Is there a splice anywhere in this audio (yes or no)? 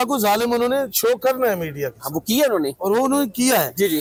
no